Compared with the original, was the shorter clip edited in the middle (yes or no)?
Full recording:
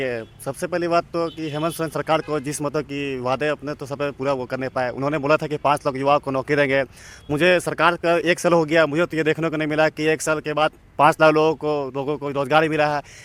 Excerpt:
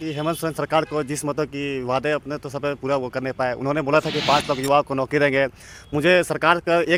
no